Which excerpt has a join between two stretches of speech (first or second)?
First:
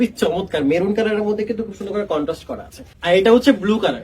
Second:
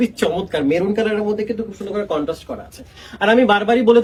first